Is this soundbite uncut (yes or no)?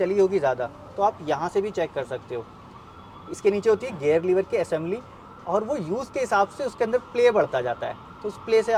yes